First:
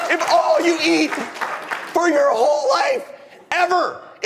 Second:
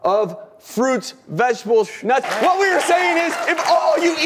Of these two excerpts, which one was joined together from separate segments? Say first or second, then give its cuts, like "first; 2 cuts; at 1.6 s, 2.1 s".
second; 1 cut; at 2.3 s